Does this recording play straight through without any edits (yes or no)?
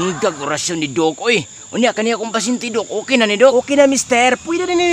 no